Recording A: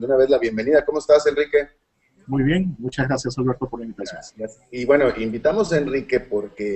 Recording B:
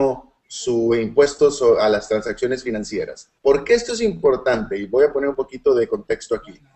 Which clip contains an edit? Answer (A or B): A